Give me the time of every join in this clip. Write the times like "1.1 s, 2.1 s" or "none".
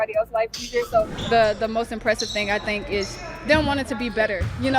1.2 s